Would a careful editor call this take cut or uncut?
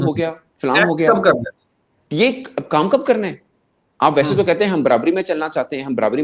uncut